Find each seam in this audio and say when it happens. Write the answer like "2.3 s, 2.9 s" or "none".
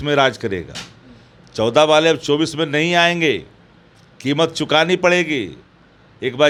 none